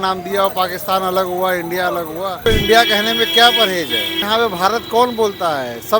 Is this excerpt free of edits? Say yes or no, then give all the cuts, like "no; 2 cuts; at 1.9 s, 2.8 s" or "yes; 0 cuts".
no; 2 cuts; at 2.4 s, 4.3 s